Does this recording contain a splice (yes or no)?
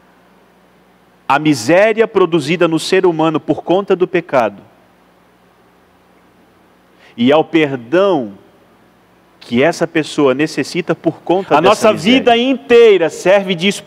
yes